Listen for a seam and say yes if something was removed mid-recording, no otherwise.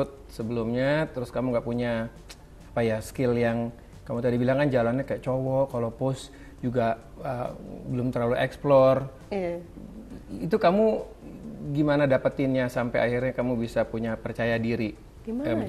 no